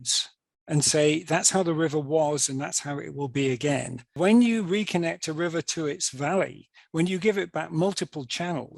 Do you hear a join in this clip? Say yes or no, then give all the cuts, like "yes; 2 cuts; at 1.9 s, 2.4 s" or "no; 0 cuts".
yes; 1 cut; at 4.1 s